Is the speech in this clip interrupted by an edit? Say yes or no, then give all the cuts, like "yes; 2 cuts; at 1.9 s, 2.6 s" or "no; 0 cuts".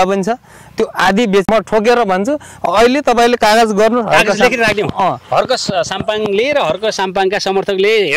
yes; 1 cut; at 1.5 s